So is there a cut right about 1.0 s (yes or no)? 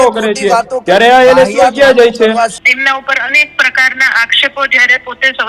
no